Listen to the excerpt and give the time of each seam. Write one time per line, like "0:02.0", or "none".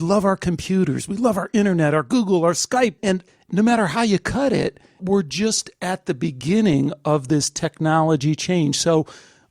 0:03.1
0:05.0